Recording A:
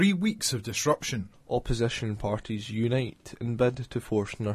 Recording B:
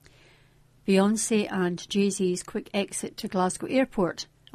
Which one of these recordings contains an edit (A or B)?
A